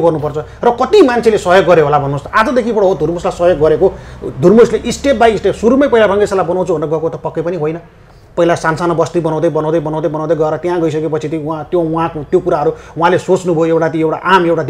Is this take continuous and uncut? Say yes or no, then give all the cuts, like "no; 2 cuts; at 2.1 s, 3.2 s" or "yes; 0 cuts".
yes; 0 cuts